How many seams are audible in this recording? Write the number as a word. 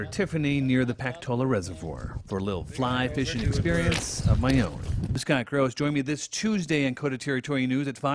one